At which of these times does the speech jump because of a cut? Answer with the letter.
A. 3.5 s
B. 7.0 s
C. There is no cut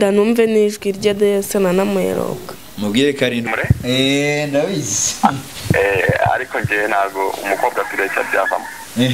A